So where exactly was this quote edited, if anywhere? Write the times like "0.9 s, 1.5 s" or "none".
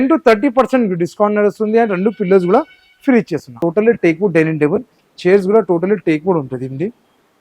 3.4 s